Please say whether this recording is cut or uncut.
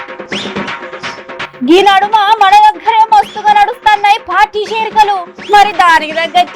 uncut